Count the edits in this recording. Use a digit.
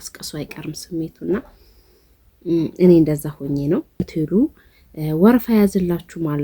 1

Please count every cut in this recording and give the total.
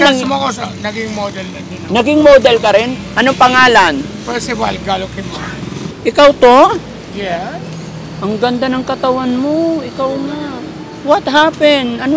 1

